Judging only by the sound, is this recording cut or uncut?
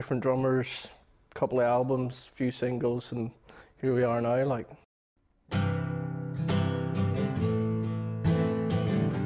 uncut